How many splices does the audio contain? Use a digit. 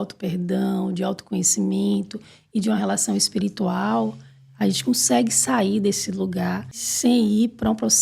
1